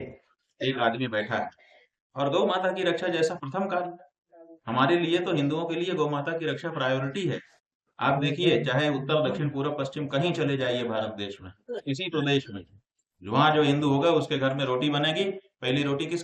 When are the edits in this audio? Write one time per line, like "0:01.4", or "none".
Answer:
none